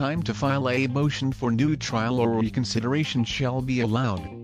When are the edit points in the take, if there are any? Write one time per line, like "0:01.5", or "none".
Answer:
none